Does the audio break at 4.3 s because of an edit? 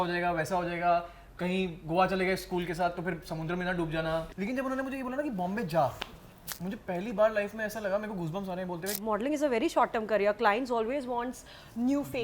yes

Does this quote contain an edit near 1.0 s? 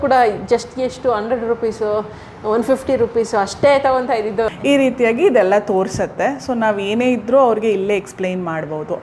no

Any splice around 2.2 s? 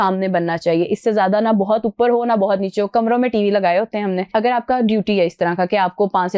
no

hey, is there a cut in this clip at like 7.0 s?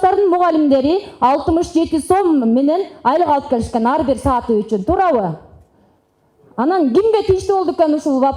no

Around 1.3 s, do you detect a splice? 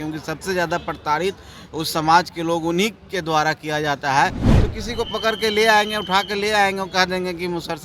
no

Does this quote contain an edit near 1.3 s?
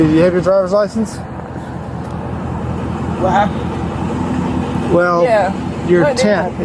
no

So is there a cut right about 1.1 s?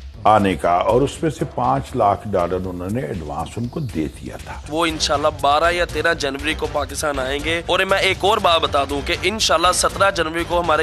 no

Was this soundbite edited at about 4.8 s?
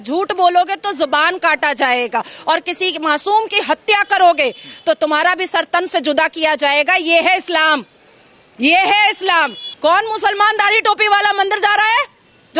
no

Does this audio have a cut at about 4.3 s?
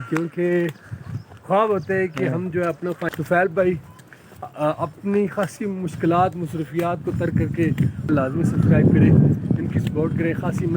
no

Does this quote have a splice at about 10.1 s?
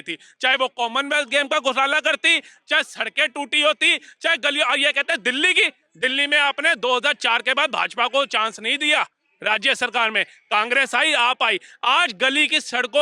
no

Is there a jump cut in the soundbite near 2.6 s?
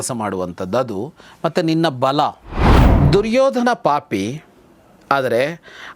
yes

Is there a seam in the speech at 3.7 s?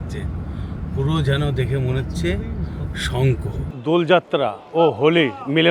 yes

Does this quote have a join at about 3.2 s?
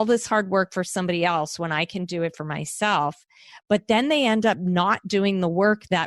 no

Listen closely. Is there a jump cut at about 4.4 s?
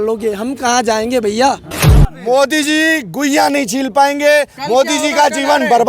no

